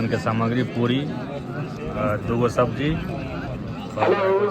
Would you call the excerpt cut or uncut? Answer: uncut